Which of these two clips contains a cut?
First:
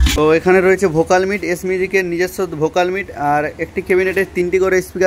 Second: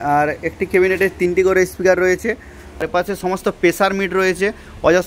second; 1 cut; at 2.9 s

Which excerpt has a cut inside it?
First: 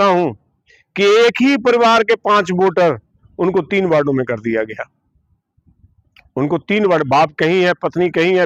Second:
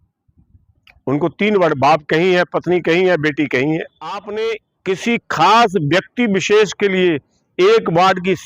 second; 1 cut; at 4.3 s

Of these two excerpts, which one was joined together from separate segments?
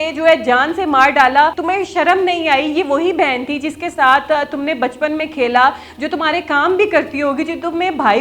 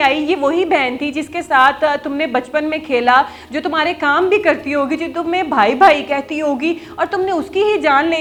first; 1 cut; at 1.6 s

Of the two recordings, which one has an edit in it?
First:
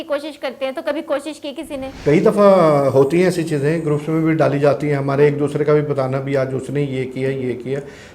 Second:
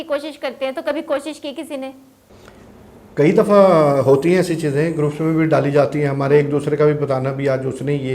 first; 1 cut; at 1.9 s

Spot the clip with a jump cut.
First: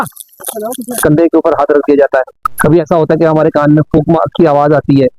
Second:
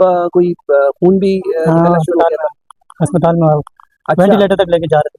first; 1 cut; at 1.0 s

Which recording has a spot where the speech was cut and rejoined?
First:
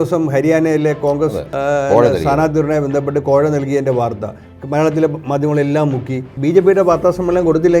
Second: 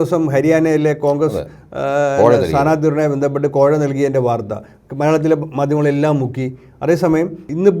first; 2 cuts; at 1.5 s, 6.3 s

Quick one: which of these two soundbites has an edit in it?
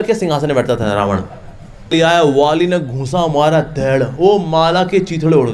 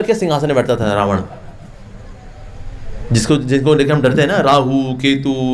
first; 1 cut; at 1.9 s

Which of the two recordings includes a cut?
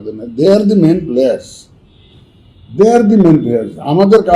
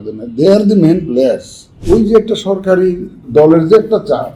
second; 2 cuts; at 1.7 s, 3.2 s

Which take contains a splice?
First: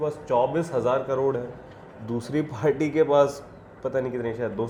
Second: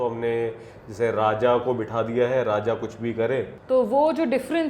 second; 1 cut; at 3.6 s

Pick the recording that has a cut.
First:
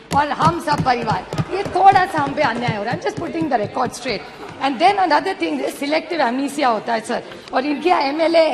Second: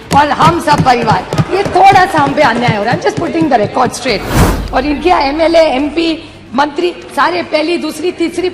second; 1 cut; at 4.5 s

